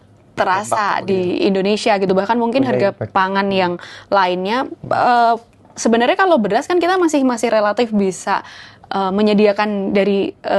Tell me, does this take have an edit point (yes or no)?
no